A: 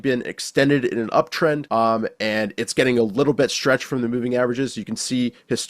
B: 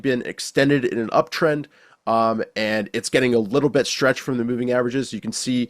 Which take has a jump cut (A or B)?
A